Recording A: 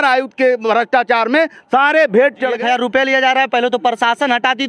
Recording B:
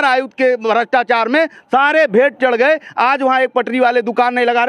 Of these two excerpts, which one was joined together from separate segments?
A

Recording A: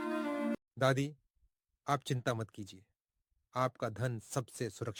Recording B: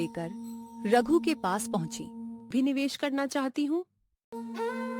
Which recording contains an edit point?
B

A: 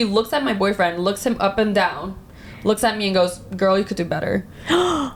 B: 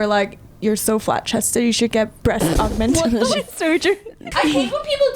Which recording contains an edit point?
B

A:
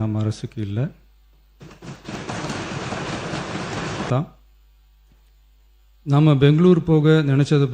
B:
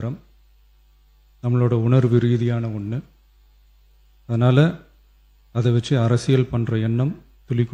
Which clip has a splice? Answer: A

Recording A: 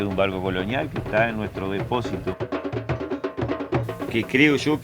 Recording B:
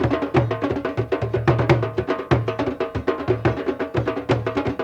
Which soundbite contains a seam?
A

